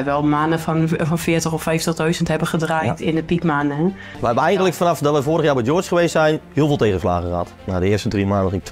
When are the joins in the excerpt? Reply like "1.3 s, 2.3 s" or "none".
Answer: 4.1 s, 6.4 s, 7.6 s